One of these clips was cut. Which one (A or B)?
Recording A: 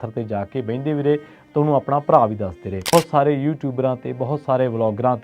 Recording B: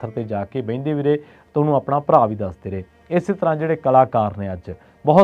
A